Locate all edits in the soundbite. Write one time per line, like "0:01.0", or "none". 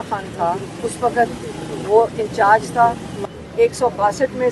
0:03.3